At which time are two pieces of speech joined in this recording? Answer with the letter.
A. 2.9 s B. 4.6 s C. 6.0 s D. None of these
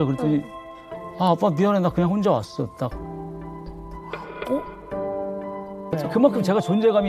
C